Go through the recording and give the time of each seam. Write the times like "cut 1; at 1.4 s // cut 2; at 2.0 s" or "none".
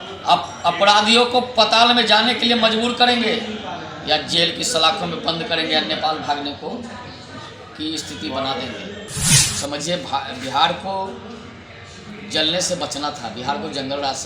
cut 1; at 9.3 s